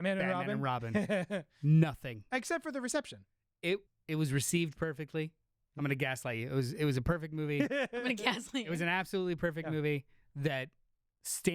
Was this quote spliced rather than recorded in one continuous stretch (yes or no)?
yes